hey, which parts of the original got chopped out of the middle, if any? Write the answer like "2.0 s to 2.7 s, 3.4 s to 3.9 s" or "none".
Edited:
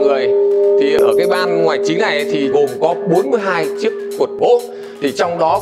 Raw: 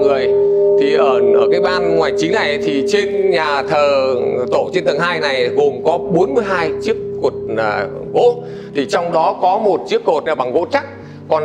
1.0 s to 1.3 s, 2.8 s to 5.5 s, 7.4 s to 8.1 s